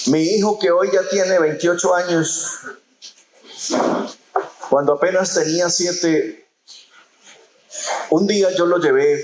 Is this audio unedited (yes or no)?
yes